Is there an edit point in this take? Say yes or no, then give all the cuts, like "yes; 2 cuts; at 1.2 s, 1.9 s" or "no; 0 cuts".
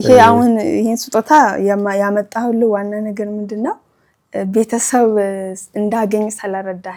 no; 0 cuts